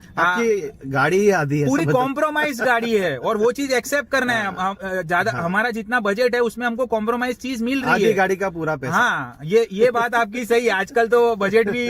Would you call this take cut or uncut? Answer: uncut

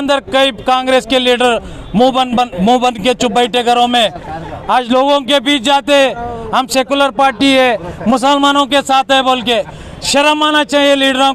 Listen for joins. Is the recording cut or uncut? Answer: uncut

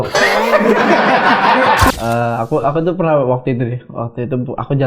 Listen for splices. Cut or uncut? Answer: cut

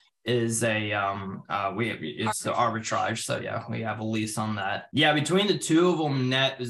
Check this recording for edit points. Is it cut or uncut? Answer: cut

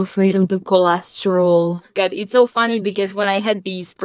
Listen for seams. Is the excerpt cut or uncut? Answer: cut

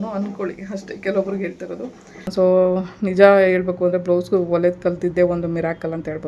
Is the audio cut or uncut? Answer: cut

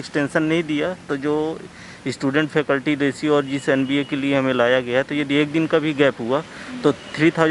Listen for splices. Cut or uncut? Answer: uncut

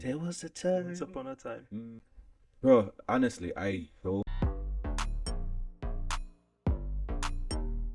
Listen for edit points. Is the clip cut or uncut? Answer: cut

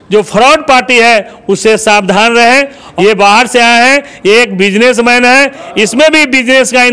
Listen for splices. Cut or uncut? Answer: cut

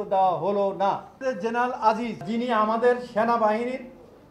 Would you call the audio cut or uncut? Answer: cut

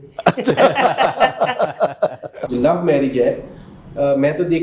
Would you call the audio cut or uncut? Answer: cut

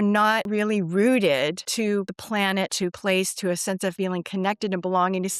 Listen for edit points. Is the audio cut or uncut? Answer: cut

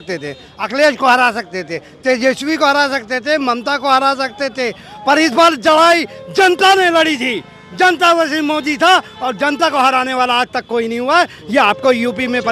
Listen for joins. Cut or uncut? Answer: uncut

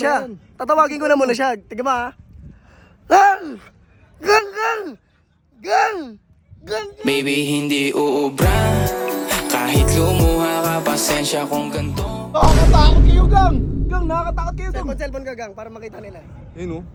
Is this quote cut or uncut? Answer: uncut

